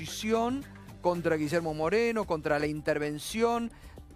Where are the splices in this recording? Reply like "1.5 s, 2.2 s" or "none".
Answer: 2.8 s